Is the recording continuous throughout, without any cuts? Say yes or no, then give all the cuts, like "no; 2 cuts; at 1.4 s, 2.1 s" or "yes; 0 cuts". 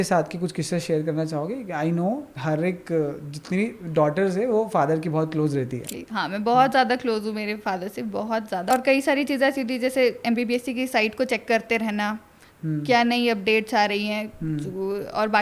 no; 2 cuts; at 5.8 s, 8.7 s